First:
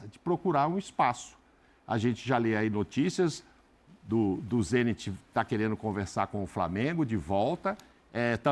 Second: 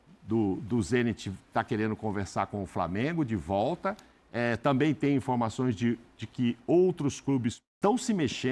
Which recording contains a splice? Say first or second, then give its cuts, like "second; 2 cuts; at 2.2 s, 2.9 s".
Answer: second; 1 cut; at 7.6 s